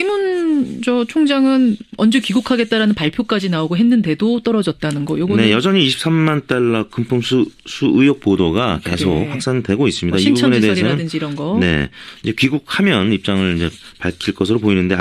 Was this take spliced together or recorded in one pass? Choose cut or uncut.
cut